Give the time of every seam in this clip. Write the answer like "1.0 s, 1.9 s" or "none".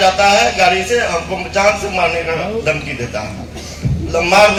none